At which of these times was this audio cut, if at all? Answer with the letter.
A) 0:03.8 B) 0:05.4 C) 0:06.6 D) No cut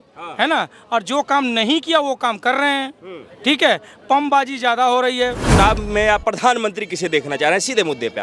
B